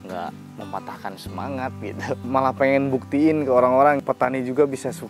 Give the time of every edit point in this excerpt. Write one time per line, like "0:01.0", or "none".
0:02.2
0:04.0